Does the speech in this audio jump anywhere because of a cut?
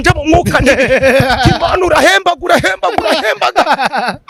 no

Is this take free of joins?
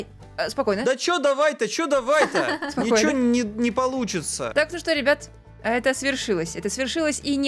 no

